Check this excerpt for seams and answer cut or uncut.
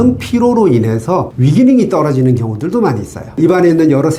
cut